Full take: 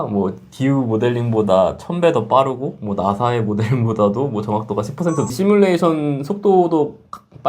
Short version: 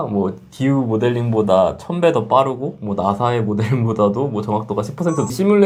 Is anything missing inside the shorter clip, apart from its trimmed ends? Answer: no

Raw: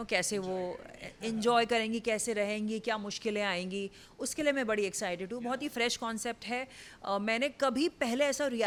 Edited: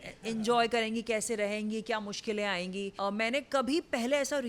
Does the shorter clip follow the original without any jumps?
no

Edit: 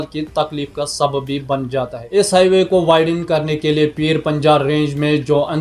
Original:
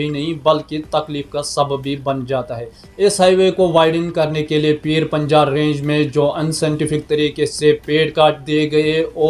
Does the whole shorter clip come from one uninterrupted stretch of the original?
no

